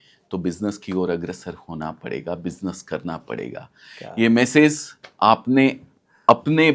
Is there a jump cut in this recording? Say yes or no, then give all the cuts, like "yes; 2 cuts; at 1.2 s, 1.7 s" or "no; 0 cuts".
no; 0 cuts